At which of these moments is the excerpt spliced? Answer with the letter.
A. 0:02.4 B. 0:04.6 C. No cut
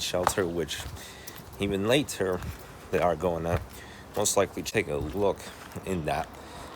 B